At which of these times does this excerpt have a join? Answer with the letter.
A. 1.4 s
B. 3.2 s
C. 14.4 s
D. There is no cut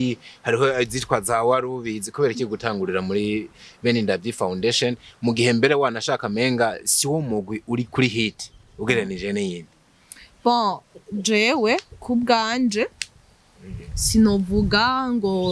D